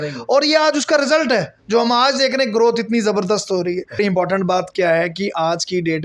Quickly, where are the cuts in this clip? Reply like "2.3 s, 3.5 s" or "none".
4.0 s